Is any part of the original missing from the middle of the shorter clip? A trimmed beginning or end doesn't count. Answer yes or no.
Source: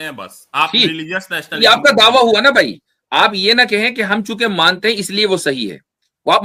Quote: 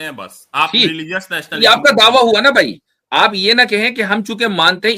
no